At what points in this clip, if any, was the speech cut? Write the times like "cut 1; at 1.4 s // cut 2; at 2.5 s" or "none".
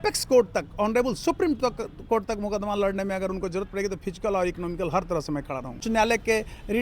cut 1; at 5.8 s